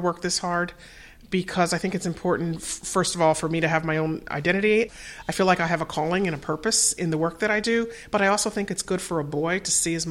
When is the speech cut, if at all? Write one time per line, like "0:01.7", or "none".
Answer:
0:04.9